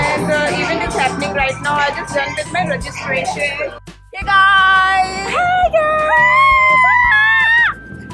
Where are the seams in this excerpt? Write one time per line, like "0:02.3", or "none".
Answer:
0:03.9